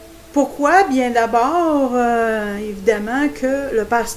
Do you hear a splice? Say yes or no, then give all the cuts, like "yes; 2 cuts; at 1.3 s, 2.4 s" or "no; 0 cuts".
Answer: yes; 1 cut; at 2.0 s